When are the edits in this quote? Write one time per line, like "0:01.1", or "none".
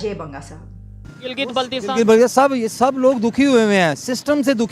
0:01.2